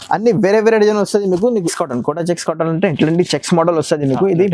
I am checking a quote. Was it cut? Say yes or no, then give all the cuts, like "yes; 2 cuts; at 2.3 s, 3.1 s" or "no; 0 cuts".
yes; 1 cut; at 1.7 s